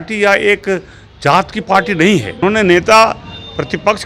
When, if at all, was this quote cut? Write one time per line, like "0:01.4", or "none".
0:02.3